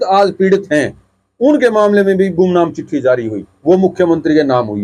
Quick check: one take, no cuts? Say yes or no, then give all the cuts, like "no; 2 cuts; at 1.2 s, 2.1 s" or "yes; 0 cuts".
yes; 0 cuts